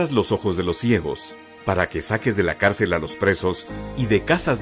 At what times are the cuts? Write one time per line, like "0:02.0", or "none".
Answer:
0:02.3